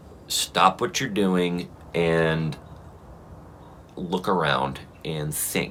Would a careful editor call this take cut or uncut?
uncut